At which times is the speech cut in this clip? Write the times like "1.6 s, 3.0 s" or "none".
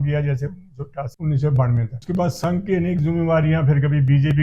1.1 s, 1.9 s